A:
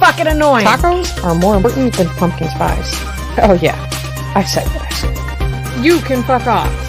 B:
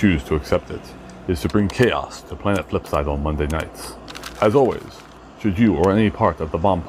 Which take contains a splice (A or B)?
A